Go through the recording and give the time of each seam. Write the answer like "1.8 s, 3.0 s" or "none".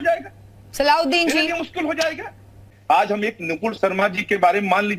2.7 s

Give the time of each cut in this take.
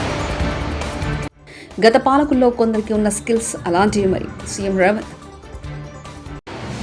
1.4 s

